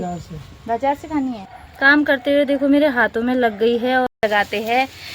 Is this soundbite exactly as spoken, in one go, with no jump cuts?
no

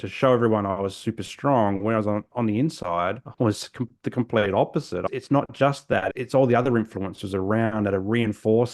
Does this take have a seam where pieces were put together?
yes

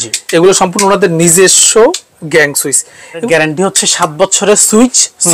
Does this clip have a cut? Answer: yes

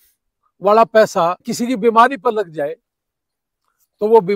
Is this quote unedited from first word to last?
no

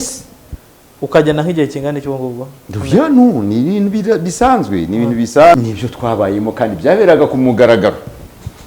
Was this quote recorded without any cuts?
no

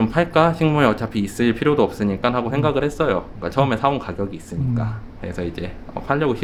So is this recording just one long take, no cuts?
yes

